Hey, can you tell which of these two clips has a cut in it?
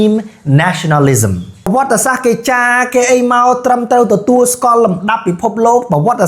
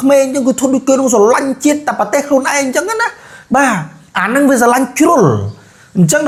first; 1 cut; at 1.7 s

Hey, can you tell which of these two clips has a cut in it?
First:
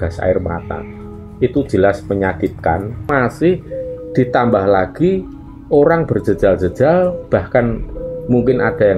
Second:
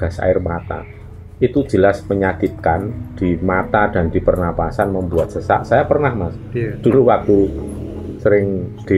first; 1 cut; at 3.1 s

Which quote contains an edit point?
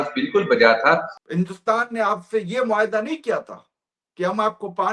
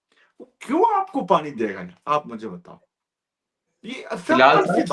first; 1 cut; at 1.2 s

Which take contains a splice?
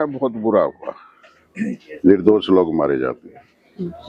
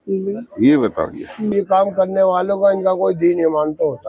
second; 1 cut; at 1.5 s

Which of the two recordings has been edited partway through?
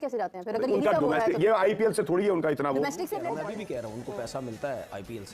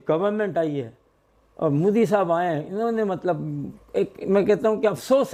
first; 1 cut; at 3.2 s

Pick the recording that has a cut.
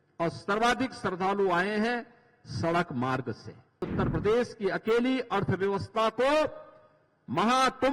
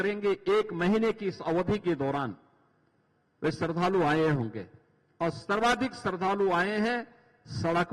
first; 1 cut; at 3.9 s

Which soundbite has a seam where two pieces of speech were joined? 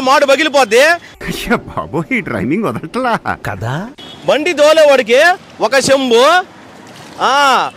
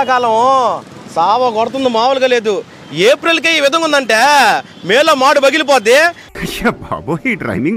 first; 2 cuts; at 3.9 s, 6.5 s

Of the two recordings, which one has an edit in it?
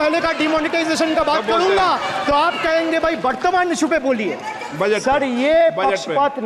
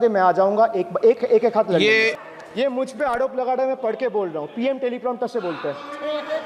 second; 1 cut; at 2.3 s

